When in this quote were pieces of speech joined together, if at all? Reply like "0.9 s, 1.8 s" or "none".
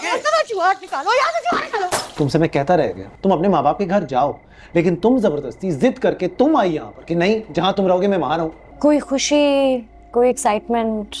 2.1 s, 3.1 s, 8.6 s